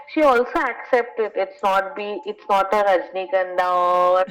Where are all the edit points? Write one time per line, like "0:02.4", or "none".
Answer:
none

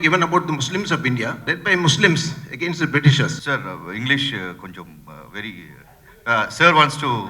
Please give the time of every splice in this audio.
0:01.5
0:03.4

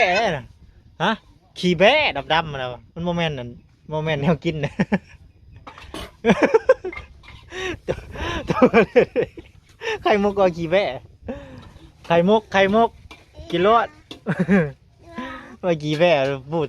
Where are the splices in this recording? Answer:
none

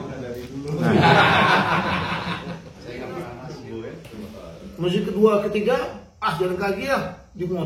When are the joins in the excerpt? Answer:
0:03.1

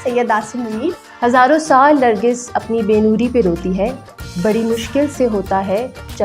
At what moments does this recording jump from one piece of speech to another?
0:01.1

